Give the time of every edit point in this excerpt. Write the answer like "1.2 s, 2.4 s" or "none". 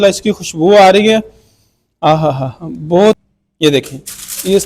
3.2 s

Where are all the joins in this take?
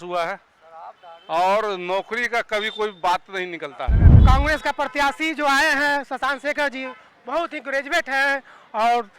4.1 s

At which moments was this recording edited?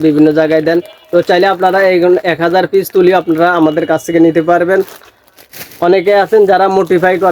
none

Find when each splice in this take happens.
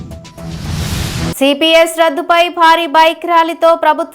1.3 s

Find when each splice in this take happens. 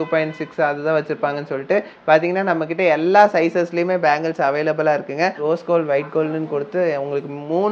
5.4 s

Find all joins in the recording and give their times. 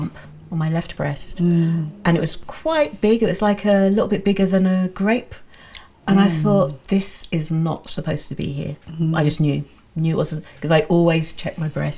none

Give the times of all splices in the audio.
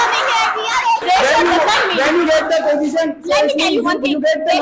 1.0 s

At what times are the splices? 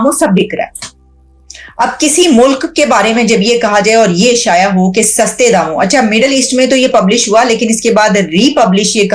none

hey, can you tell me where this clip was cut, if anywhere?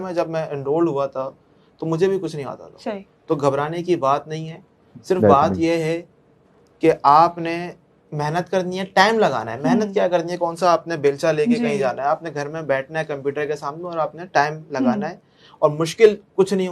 none

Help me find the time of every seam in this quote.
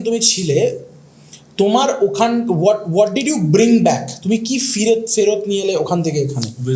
none

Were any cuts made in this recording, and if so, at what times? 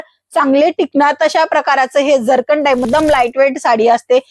2.9 s

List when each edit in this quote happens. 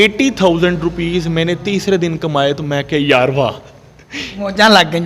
none

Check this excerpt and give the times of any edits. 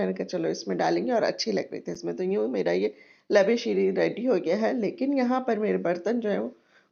none

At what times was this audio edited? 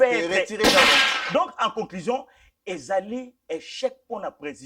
1.0 s

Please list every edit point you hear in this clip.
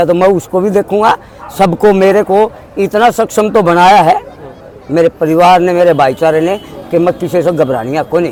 none

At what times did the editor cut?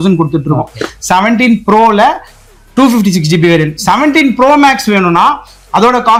none

